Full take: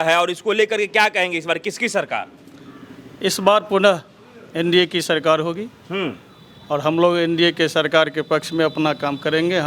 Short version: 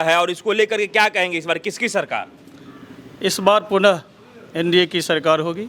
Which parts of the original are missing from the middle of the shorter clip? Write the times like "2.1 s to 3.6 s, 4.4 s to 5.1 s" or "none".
none